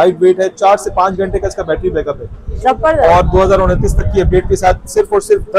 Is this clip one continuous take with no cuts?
yes; 0 cuts

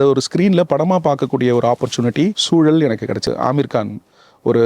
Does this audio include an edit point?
yes; 2 cuts; at 2.4 s, 3.3 s

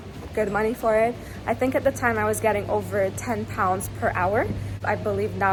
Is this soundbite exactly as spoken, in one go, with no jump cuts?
yes; 0 cuts

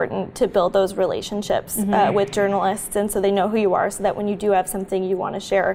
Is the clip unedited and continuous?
yes; 0 cuts

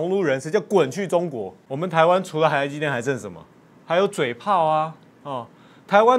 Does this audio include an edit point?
yes; 1 cut; at 1.5 s

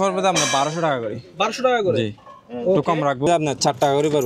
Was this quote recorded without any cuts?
no; 1 cut; at 3.3 s

